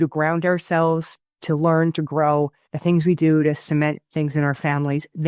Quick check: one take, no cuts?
no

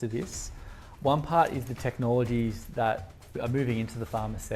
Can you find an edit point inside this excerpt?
yes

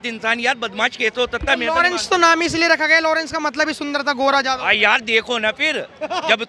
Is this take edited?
no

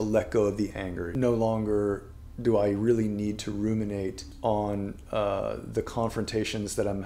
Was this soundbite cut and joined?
yes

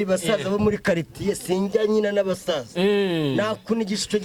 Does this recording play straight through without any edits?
yes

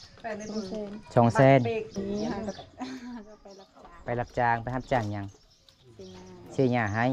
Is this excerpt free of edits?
no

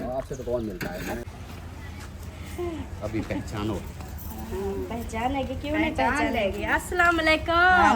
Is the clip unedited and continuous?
no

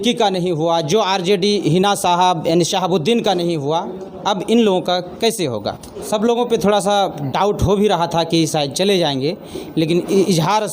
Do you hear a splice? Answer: yes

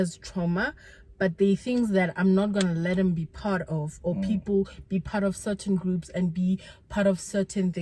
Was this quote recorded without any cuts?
yes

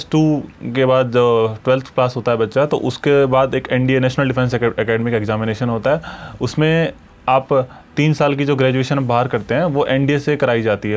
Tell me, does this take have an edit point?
no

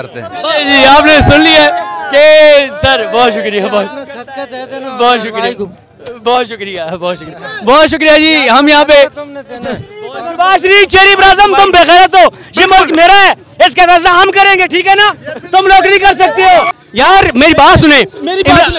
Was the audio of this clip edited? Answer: yes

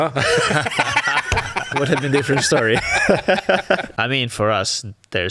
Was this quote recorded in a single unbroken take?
no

